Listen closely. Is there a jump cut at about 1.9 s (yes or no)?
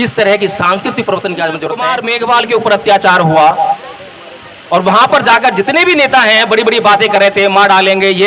yes